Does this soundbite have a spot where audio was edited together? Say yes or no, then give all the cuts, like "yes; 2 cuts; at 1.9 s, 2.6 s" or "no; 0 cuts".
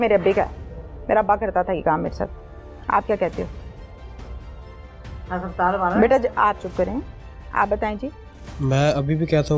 no; 0 cuts